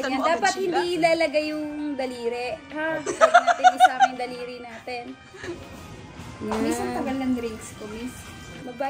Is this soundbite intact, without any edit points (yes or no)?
yes